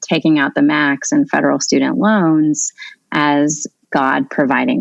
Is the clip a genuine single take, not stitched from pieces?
no; 1 cut; at 3.7 s

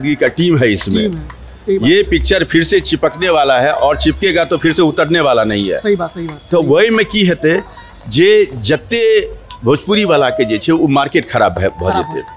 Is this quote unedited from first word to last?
no; 1 cut; at 6.1 s

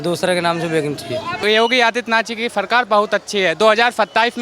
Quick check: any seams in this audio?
yes; 1 cut; at 1.3 s

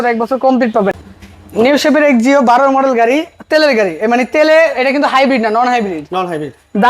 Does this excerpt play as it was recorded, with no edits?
no; 1 cut; at 1.0 s

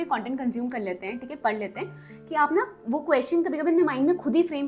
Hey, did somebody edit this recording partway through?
no; 0 cuts

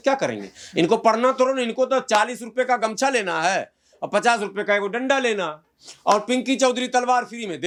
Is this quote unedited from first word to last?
yes; 0 cuts

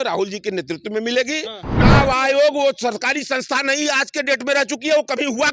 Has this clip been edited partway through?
yes; 1 cut; at 1.7 s

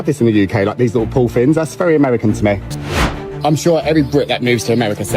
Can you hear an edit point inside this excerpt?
yes; 1 cut; at 3.0 s

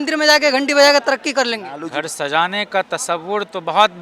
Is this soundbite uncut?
no; 1 cut; at 1.6 s

